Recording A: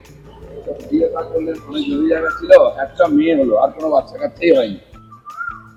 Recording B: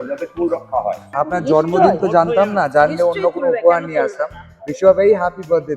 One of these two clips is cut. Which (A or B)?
B